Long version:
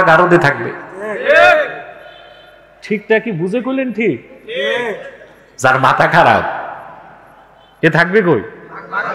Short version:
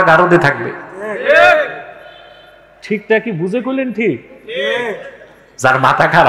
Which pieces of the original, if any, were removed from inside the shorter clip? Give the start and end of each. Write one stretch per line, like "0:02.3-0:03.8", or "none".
none